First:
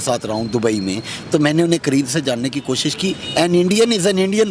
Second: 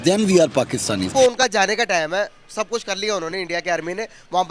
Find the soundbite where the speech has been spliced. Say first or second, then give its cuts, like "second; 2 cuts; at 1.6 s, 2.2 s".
second; 1 cut; at 1.1 s